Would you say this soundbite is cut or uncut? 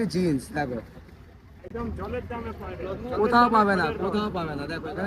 uncut